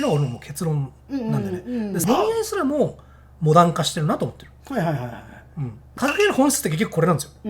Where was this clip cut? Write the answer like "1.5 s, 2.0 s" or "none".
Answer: 2.0 s, 5.8 s

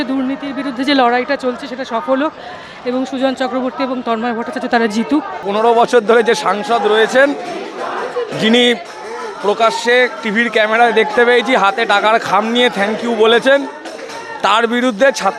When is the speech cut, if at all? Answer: 5.4 s

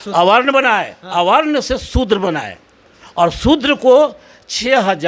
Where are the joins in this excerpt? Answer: none

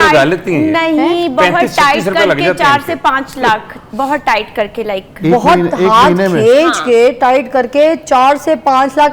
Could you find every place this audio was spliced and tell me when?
none

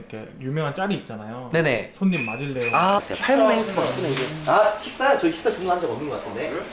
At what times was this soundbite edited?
3.0 s

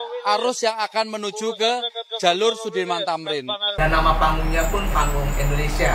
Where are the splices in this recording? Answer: 3.7 s

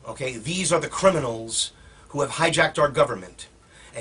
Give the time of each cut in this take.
2.9 s

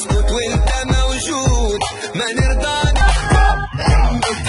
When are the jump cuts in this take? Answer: 3.0 s

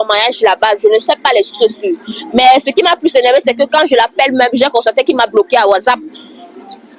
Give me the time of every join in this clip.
none

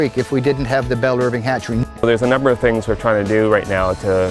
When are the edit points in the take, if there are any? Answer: 1.8 s

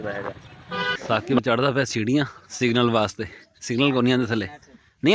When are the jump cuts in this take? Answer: 1.0 s

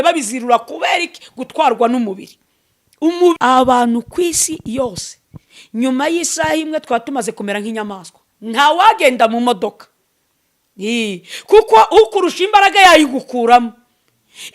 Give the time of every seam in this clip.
3.4 s

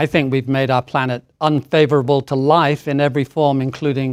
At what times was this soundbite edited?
1.3 s

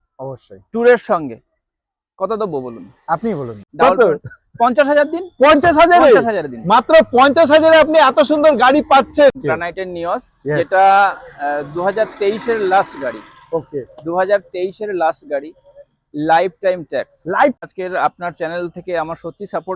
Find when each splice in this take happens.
3.6 s, 9.4 s, 17.6 s

